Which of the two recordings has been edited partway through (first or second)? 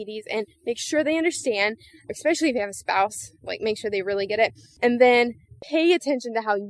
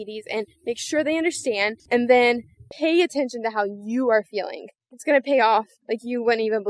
second